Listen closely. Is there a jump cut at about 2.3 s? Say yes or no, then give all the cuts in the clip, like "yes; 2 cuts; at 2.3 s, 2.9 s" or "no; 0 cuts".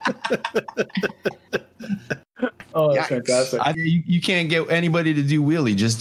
yes; 2 cuts; at 2.3 s, 3.8 s